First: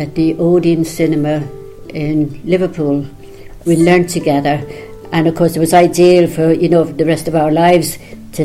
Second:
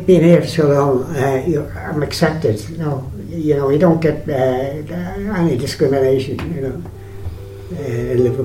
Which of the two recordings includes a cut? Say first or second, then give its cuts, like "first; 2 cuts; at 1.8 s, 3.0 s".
first; 1 cut; at 3.5 s